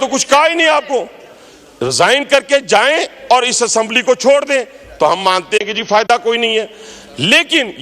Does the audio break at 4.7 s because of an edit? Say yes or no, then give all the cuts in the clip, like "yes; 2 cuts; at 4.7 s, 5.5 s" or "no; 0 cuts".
no; 0 cuts